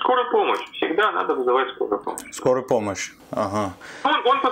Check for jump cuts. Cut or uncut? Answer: uncut